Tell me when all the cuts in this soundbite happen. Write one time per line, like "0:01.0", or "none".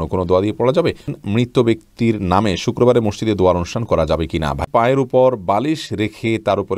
0:01.2
0:04.6